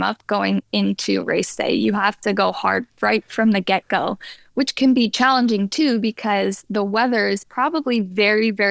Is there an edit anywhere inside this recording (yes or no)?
no